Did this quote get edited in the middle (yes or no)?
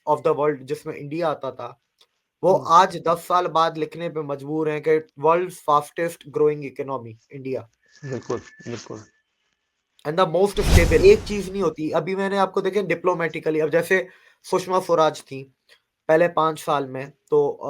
yes